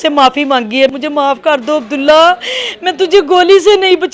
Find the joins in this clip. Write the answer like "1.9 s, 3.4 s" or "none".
0.9 s